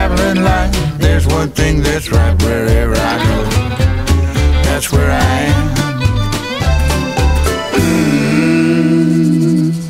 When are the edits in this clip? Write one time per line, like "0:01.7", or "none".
none